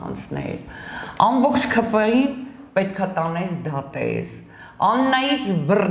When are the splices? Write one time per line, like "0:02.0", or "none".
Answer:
none